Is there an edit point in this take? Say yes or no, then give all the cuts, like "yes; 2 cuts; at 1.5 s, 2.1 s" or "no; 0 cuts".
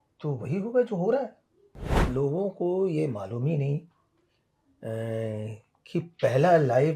yes; 1 cut; at 2.0 s